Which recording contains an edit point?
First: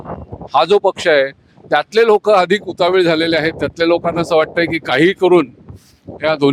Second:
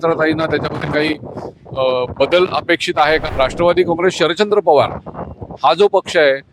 second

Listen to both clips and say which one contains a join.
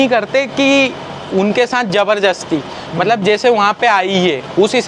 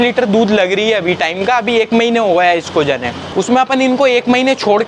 second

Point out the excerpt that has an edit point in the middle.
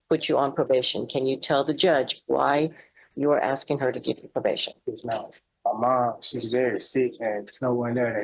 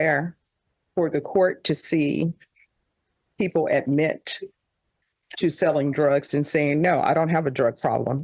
first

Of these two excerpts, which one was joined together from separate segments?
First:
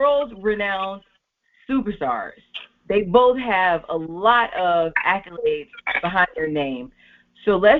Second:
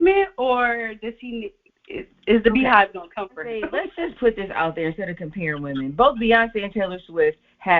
second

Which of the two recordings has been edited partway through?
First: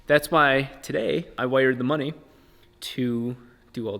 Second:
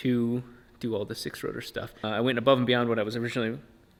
first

